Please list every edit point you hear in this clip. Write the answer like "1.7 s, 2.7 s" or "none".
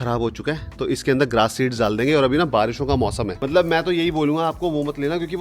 3.3 s